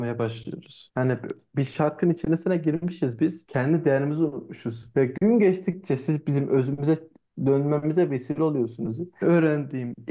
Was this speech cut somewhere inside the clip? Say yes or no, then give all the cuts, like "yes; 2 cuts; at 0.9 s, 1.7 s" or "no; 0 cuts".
no; 0 cuts